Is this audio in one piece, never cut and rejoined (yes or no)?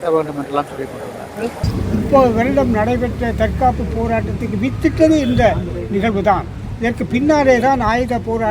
no